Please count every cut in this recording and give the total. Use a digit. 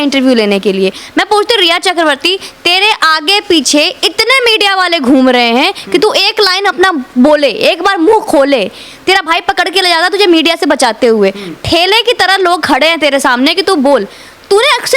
0